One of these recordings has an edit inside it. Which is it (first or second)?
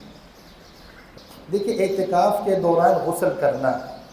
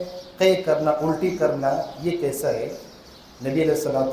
first